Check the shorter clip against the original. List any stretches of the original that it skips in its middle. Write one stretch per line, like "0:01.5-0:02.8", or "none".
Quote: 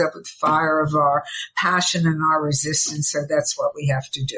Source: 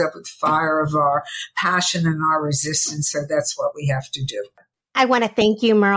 none